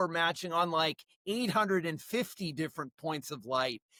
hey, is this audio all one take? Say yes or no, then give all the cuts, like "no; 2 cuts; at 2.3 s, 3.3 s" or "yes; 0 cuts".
yes; 0 cuts